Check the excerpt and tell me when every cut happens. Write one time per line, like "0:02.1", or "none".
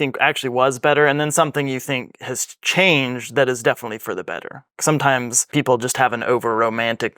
0:05.4